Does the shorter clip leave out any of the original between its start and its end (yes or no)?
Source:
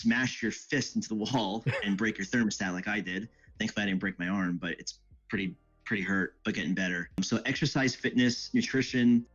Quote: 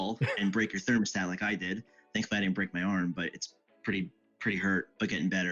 no